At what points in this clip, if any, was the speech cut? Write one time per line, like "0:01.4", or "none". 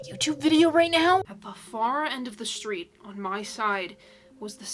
0:01.3